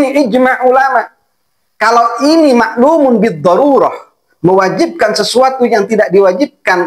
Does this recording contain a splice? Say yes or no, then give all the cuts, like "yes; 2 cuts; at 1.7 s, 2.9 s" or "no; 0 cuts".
no; 0 cuts